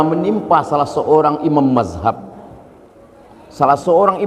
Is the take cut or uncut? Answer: uncut